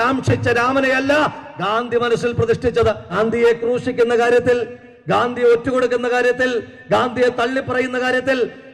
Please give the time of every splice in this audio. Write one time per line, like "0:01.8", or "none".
0:03.1